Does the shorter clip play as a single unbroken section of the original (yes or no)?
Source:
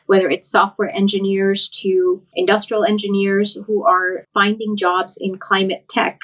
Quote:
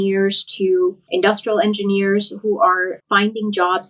yes